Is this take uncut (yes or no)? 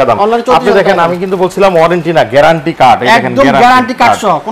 yes